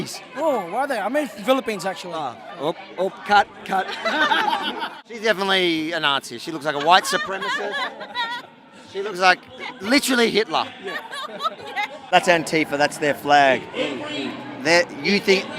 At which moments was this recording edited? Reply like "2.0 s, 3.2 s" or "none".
5.0 s, 12.1 s